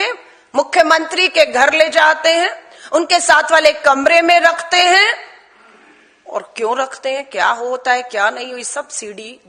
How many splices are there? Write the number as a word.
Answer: zero